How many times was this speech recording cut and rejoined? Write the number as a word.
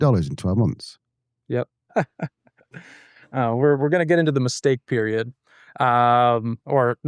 one